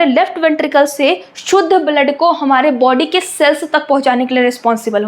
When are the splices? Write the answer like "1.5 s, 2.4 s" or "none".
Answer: none